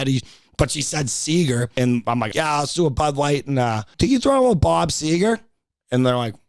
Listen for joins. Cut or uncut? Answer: cut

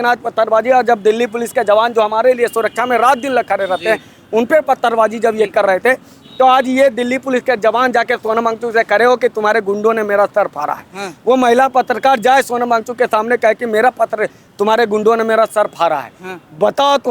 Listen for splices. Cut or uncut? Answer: uncut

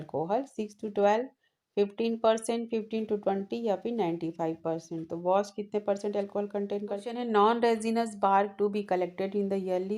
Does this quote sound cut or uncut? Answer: cut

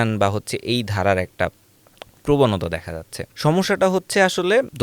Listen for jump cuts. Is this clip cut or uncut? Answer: uncut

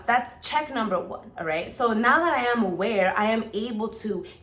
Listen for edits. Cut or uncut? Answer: uncut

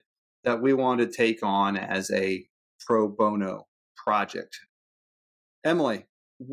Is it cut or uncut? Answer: uncut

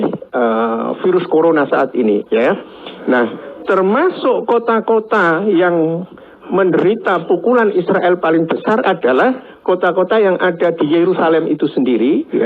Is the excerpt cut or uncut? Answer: uncut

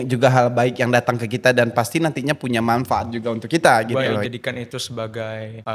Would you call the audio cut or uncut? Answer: cut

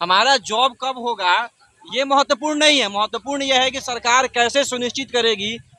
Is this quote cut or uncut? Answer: uncut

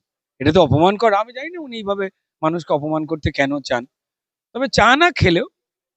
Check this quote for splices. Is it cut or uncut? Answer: uncut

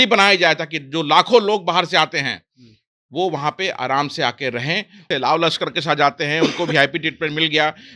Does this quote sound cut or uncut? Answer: cut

